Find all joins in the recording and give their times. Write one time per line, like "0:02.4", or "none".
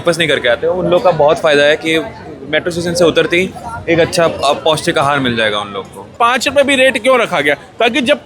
0:06.1